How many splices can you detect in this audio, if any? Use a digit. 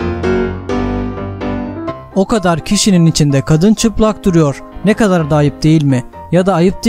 1